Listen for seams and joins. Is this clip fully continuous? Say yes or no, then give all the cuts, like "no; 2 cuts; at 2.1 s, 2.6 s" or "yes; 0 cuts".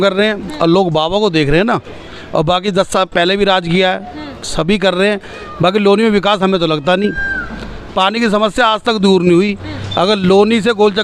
yes; 0 cuts